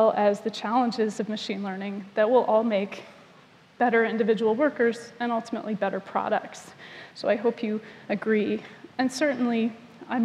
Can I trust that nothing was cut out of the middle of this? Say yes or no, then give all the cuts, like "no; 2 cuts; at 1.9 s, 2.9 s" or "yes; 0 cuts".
no; 1 cut; at 3.7 s